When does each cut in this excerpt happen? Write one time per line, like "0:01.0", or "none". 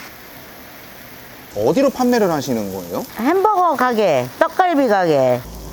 0:01.5

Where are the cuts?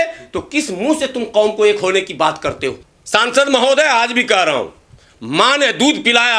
0:02.9

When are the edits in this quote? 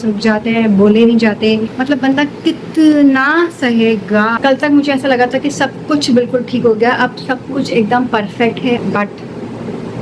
0:01.7
0:04.4
0:08.8

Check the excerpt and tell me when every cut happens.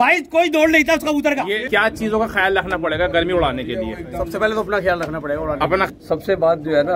0:01.6
0:05.9

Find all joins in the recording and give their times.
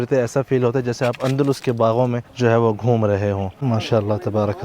0:02.3
0:03.6

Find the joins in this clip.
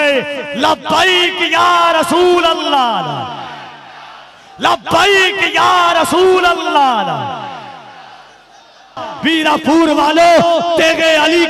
0:09.0

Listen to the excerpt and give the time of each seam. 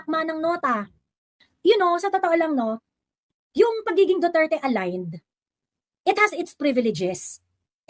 0:01.4

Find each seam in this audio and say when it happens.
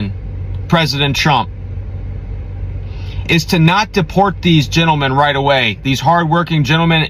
none

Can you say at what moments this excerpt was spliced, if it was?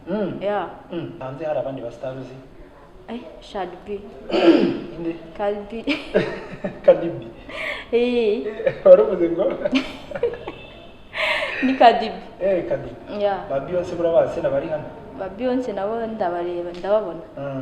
0:01.2

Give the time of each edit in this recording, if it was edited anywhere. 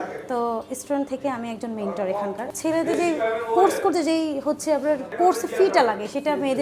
0:02.5
0:05.1

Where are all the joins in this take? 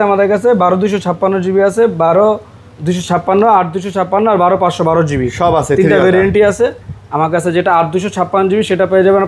none

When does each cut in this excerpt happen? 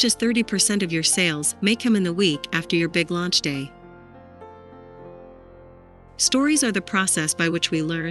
0:03.7
0:06.2

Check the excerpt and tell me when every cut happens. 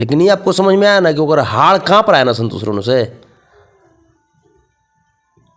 none

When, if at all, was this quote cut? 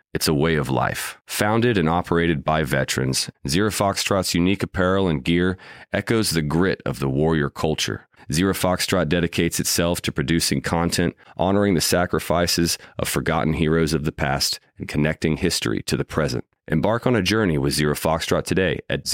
none

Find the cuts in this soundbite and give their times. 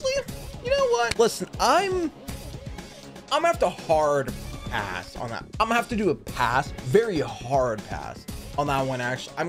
0:01.1
0:05.4

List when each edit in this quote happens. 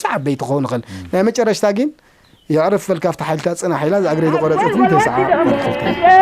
0:04.9

